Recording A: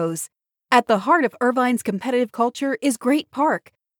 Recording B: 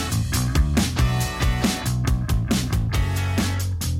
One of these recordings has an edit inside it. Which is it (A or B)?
B